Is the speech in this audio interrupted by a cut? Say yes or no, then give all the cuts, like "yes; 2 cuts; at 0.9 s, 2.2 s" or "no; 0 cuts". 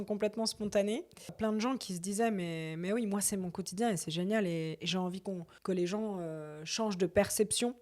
yes; 2 cuts; at 1.3 s, 5.5 s